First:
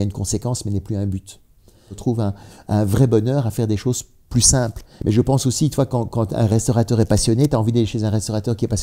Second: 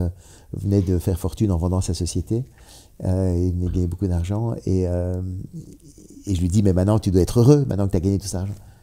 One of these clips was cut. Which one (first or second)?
first